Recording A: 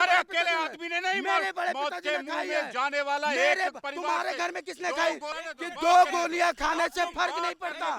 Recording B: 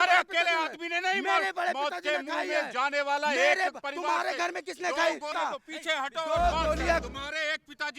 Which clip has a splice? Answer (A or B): B